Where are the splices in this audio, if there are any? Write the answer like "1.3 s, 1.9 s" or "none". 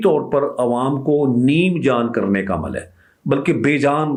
none